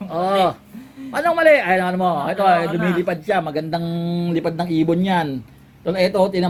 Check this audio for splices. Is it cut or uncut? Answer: uncut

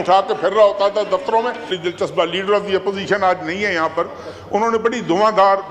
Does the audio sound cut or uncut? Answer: uncut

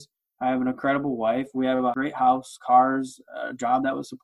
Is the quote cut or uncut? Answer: cut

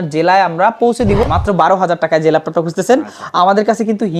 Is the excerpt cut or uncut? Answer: cut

